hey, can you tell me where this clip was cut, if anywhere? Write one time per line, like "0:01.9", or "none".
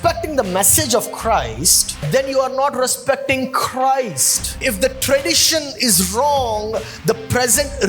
0:02.0
0:04.6